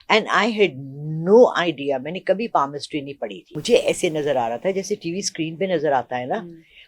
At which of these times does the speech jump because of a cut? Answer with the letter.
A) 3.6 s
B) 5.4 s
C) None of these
A